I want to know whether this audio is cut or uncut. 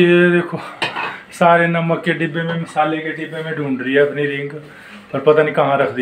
uncut